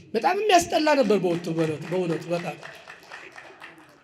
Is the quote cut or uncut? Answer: uncut